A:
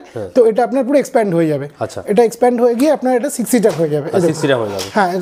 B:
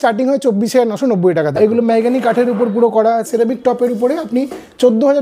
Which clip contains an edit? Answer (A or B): B